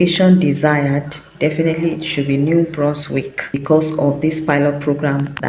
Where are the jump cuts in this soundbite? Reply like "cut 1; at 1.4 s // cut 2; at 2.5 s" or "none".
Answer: cut 1; at 3.6 s